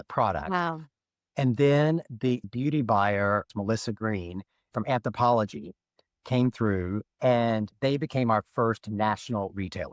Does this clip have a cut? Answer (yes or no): yes